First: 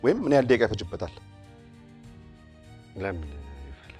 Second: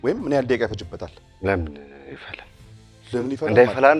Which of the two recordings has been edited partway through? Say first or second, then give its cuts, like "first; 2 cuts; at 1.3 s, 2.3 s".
second; 1 cut; at 1.2 s